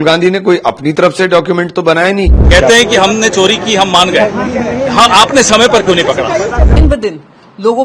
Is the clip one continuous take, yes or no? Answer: no